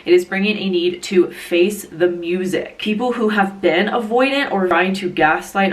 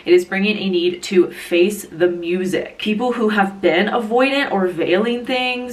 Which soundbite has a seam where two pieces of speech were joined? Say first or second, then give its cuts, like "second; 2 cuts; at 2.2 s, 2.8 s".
first; 1 cut; at 4.7 s